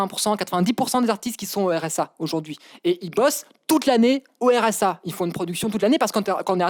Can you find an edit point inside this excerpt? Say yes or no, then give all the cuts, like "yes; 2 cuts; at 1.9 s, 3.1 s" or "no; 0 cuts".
no; 0 cuts